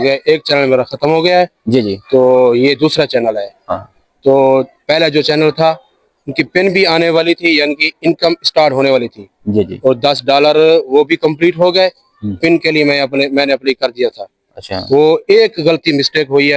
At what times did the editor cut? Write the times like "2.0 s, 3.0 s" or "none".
none

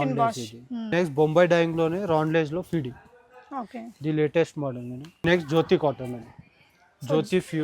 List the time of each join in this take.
0.9 s, 5.2 s

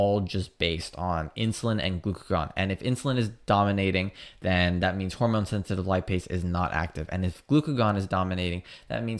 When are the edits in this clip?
none

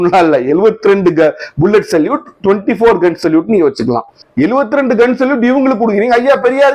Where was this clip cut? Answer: 4.2 s

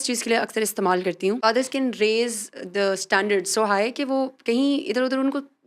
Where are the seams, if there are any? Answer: 1.4 s

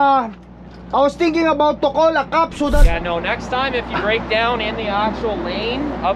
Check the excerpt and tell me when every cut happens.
2.8 s

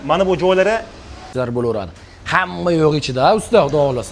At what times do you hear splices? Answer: 1.3 s

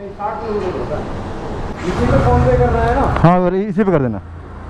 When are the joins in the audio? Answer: 1.7 s

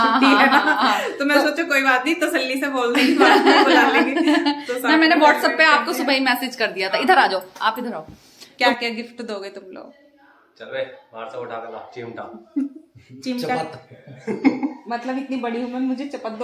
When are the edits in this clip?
8.5 s

